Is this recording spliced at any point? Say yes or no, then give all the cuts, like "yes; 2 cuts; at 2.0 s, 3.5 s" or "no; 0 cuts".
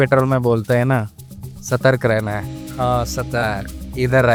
no; 0 cuts